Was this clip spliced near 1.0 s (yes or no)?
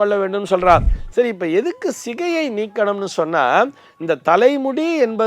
yes